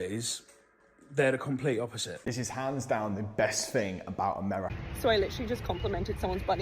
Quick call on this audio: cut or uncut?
cut